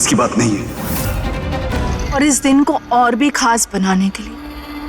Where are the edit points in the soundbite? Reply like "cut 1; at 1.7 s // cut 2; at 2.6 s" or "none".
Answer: cut 1; at 1.7 s